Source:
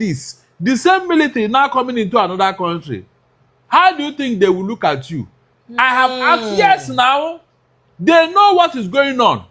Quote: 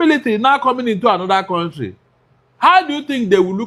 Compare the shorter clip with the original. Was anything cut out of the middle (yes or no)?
no